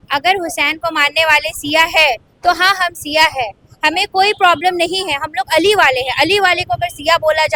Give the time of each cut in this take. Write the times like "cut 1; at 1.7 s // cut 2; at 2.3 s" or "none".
none

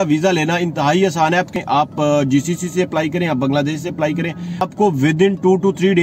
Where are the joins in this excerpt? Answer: cut 1; at 1.6 s // cut 2; at 4.6 s

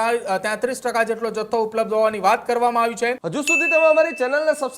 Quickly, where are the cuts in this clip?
cut 1; at 3.3 s

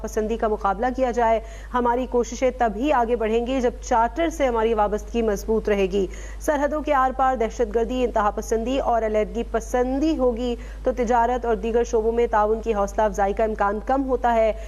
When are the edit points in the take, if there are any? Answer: none

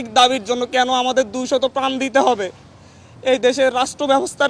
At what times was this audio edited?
none

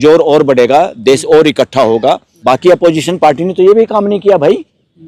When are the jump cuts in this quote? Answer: cut 1; at 2.3 s

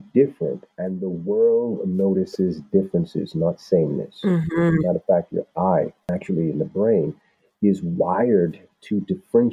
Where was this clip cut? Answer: none

